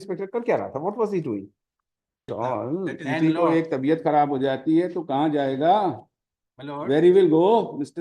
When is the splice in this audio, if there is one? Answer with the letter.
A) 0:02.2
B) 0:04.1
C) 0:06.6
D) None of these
A